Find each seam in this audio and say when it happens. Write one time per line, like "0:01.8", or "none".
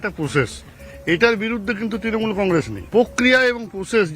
0:02.8